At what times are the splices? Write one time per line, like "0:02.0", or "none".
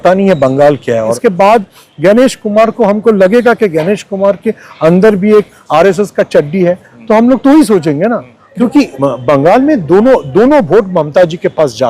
0:01.1
0:08.5